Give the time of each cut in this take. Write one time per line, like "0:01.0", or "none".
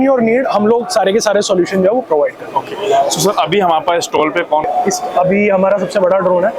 0:04.7